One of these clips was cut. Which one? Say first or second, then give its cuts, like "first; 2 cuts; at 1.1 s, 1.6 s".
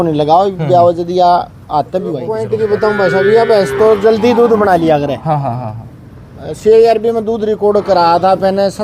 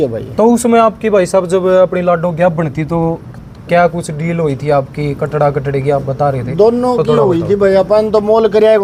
first; 1 cut; at 2.3 s